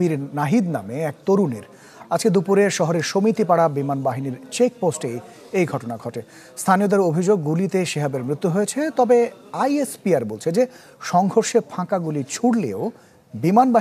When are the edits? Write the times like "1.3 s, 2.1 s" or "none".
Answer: none